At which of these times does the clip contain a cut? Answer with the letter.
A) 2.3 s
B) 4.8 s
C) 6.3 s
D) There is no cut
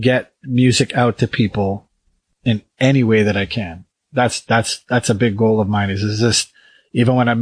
A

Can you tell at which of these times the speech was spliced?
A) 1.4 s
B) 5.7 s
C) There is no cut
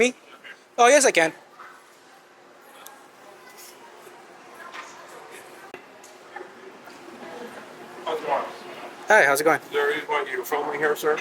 B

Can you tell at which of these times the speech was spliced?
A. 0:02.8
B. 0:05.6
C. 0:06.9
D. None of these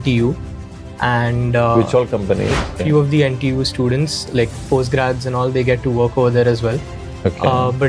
A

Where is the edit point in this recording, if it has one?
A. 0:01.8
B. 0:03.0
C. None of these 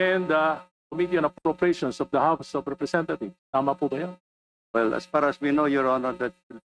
B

